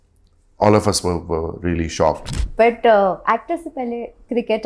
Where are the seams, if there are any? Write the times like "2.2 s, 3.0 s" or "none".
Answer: 2.4 s